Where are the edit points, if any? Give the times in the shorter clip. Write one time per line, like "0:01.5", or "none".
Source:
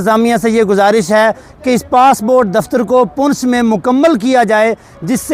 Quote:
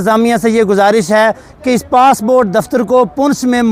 none